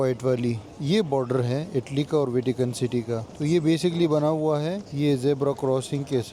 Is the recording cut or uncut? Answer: uncut